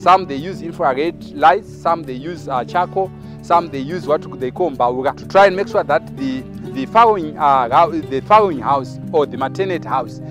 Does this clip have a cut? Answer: yes; 1 cut; at 5.2 s

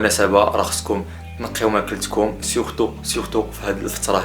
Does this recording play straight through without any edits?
yes; 0 cuts

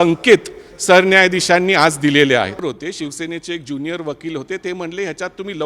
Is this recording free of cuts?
no; 1 cut; at 2.6 s

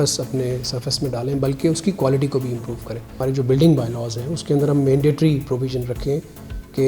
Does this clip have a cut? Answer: yes; 1 cut; at 3.2 s

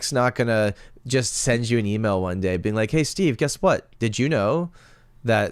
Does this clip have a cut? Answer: no; 0 cuts

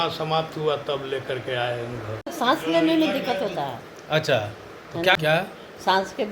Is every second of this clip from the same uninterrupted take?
no; 2 cuts; at 2.2 s, 5.2 s

